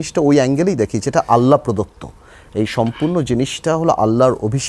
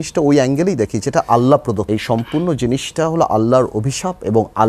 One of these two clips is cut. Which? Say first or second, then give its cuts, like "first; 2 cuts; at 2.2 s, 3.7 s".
second; 1 cut; at 1.8 s